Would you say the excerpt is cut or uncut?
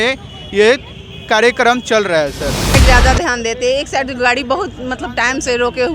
cut